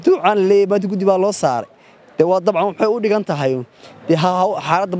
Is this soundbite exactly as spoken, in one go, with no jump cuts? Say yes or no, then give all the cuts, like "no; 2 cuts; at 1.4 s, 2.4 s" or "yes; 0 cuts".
yes; 0 cuts